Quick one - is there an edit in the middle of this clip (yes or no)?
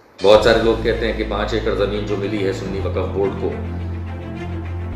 yes